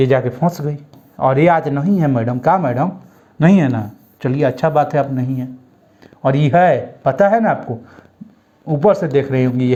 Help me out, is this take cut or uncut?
uncut